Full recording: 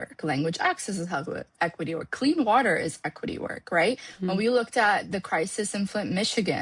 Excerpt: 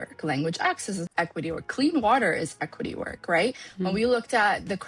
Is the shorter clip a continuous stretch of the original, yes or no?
no